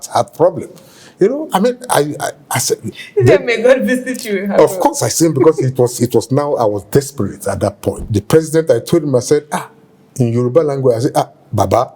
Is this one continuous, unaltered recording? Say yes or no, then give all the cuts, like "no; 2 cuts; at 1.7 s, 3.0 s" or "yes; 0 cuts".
no; 1 cut; at 8.0 s